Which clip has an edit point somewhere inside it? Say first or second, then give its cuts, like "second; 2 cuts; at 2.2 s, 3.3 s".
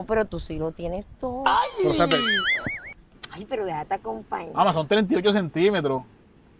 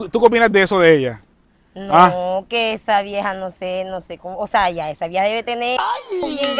first; 1 cut; at 3.1 s